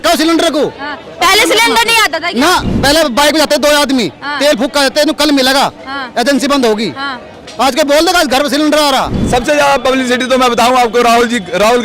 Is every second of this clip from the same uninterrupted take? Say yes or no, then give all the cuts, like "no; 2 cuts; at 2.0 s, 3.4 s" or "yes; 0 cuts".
no; 1 cut; at 9.2 s